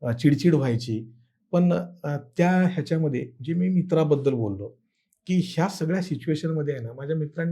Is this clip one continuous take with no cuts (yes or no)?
yes